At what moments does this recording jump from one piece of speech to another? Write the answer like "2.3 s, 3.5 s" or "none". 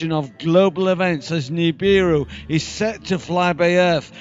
1.2 s